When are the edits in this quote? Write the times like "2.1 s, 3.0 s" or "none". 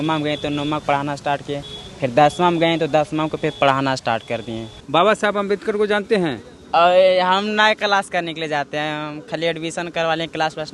4.7 s